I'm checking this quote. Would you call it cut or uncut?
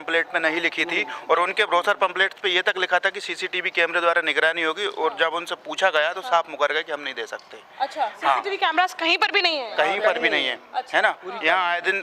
uncut